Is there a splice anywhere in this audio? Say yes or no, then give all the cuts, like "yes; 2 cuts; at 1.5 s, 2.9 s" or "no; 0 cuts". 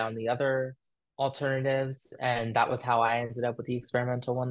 no; 0 cuts